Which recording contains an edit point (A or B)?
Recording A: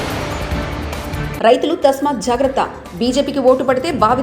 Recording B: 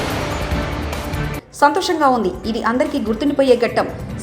B